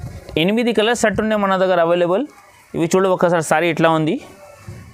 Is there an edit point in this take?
no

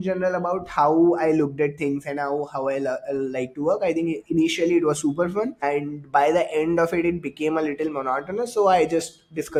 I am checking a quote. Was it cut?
no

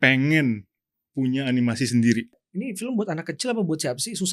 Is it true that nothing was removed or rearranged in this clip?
no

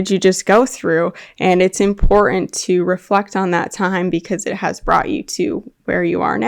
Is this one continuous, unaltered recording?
yes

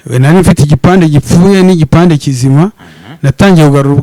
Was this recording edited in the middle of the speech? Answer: no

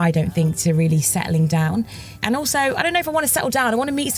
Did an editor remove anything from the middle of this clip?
yes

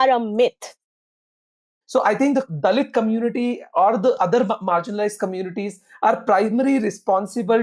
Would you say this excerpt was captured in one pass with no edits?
no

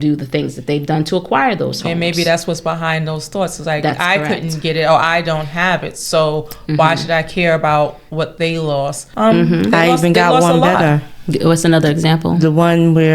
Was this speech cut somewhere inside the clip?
yes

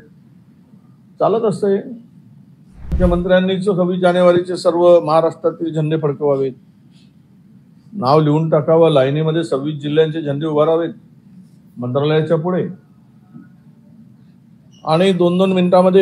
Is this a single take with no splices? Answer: no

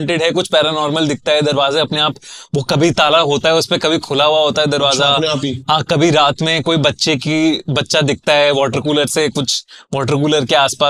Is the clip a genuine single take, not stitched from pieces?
yes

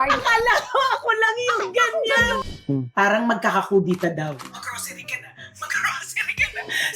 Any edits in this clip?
yes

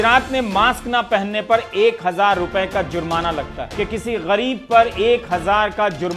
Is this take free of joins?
no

